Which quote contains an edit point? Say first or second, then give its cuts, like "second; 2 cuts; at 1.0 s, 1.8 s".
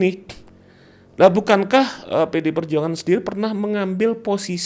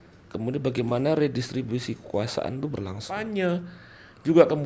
second; 1 cut; at 3.3 s